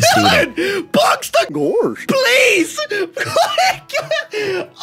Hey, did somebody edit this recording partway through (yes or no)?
yes